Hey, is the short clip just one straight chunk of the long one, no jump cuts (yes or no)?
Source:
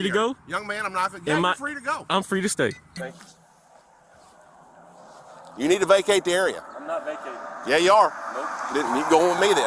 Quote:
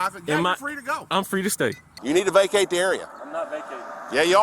no